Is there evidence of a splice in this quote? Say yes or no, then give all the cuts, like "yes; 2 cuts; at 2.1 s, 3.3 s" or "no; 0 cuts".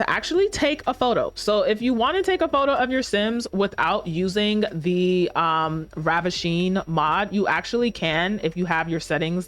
no; 0 cuts